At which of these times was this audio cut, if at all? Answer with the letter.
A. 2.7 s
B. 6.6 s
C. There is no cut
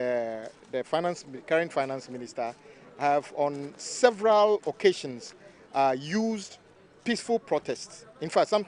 C